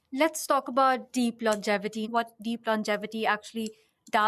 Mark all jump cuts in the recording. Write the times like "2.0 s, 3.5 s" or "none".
2.1 s